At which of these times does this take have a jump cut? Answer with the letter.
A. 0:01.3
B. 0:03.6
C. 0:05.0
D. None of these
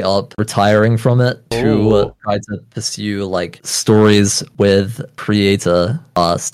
D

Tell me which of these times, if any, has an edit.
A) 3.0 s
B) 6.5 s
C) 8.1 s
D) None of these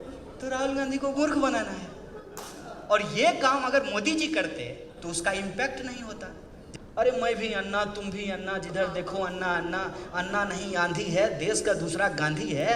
B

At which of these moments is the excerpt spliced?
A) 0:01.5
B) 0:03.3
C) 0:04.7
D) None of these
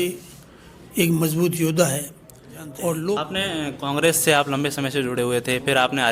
B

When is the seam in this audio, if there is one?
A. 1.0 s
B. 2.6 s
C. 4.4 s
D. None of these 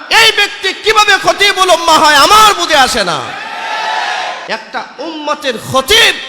C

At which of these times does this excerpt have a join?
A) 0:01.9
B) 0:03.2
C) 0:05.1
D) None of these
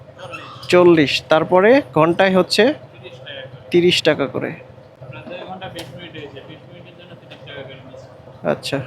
D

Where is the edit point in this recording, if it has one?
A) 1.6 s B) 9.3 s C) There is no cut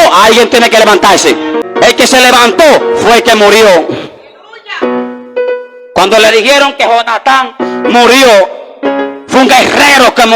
A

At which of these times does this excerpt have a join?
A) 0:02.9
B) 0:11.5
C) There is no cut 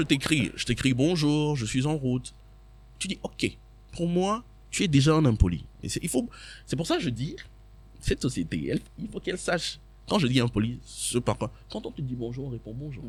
C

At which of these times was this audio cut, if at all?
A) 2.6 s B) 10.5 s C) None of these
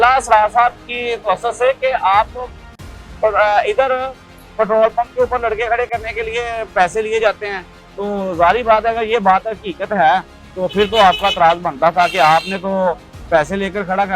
C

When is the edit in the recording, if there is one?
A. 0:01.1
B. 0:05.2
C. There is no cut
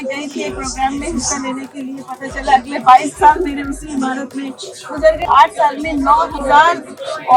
B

